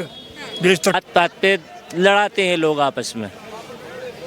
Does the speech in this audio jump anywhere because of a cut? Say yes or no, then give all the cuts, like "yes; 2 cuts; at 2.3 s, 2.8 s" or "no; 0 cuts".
yes; 1 cut; at 0.9 s